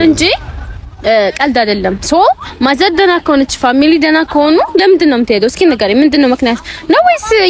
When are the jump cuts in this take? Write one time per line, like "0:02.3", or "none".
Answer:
none